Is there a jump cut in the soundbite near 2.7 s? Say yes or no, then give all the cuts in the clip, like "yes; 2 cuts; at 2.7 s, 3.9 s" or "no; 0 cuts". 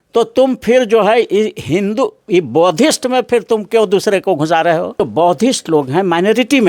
no; 1 cut; at 5.1 s